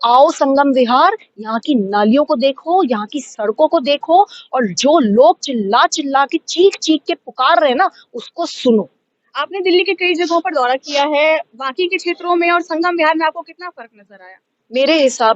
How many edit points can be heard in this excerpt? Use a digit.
0